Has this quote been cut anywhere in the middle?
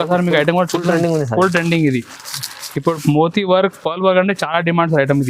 no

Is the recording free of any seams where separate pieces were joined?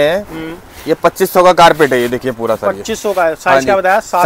yes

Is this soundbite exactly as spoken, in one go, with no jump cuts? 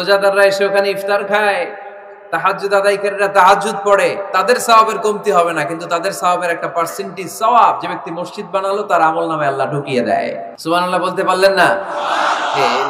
no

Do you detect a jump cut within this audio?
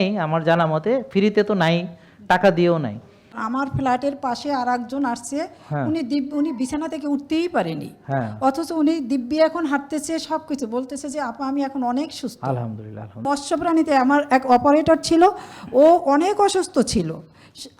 yes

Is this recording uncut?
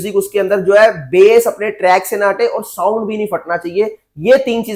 yes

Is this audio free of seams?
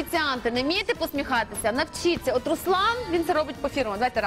yes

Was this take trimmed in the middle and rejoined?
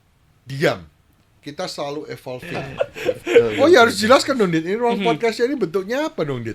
yes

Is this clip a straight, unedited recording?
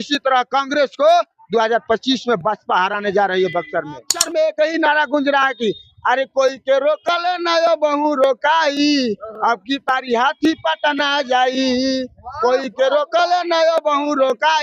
no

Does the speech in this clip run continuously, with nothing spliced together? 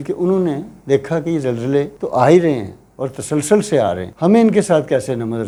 yes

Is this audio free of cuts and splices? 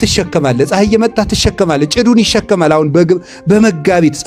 yes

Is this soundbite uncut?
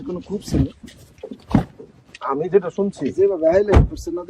yes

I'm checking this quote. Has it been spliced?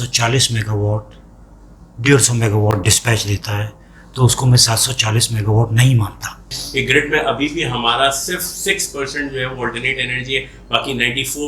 yes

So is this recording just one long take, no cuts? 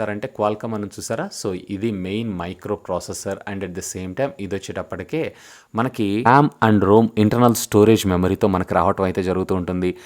yes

